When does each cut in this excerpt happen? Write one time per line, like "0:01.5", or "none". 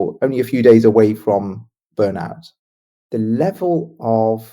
0:02.6